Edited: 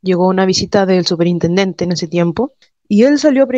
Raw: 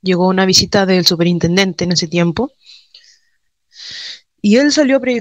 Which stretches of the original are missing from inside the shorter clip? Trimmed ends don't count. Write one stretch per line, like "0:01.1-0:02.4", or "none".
0:02.7-0:04.2